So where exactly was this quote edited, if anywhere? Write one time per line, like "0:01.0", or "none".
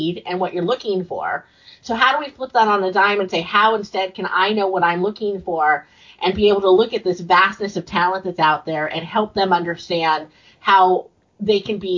none